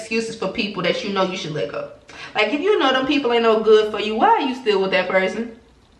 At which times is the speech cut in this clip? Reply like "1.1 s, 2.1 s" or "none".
none